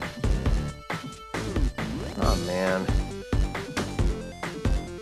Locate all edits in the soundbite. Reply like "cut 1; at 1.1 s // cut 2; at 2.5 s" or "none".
cut 1; at 0.9 s